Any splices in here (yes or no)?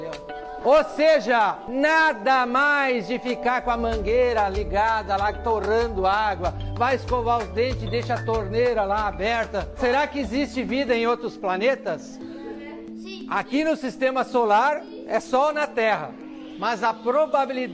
yes